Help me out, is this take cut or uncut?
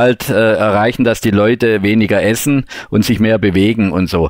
uncut